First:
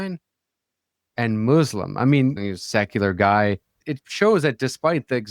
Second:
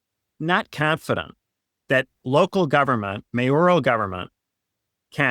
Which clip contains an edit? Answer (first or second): first